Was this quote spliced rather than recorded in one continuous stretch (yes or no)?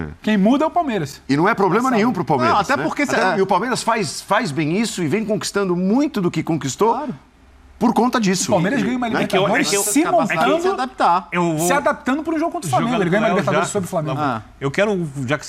no